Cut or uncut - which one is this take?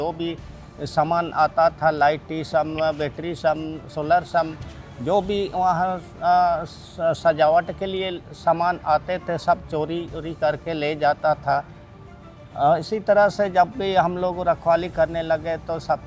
uncut